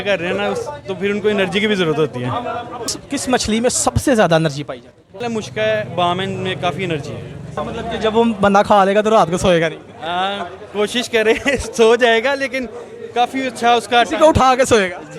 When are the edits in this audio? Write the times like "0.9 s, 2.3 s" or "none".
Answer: 2.9 s, 5.2 s, 7.6 s